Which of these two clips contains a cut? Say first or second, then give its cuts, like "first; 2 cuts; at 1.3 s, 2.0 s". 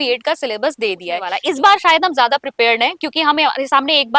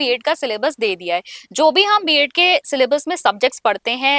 first; 1 cut; at 1.3 s